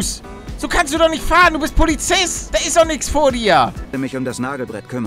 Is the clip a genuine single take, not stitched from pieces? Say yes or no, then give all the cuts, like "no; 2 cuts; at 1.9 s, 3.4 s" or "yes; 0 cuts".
no; 2 cuts; at 2.4 s, 3.9 s